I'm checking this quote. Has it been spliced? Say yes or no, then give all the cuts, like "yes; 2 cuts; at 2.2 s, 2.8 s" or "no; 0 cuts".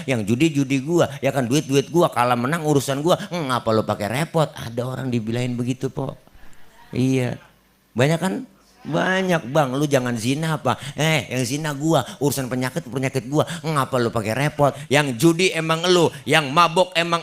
yes; 1 cut; at 14.8 s